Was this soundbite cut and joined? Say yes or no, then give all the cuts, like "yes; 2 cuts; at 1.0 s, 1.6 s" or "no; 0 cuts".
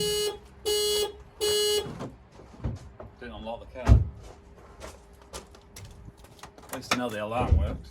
no; 0 cuts